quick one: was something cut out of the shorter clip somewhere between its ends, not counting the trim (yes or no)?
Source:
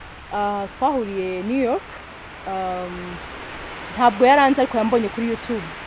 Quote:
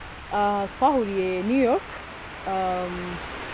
no